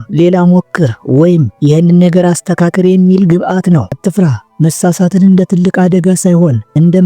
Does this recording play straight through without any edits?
no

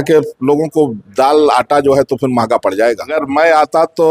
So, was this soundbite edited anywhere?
yes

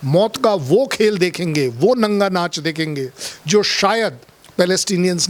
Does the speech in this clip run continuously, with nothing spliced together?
yes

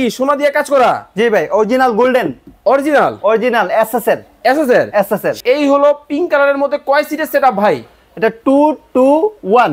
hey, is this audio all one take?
no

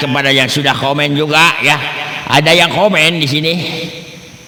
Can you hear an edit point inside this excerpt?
no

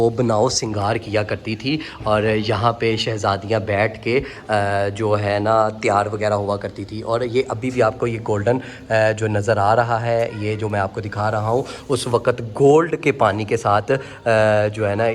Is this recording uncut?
yes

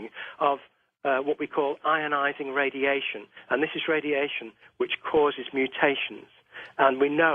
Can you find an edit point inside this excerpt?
yes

